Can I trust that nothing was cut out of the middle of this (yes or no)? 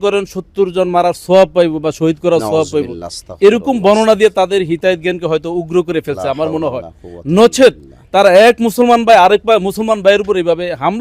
yes